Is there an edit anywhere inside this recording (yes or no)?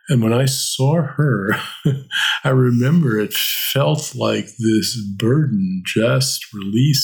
no